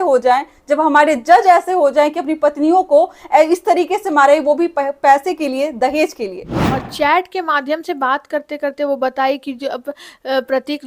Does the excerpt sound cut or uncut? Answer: cut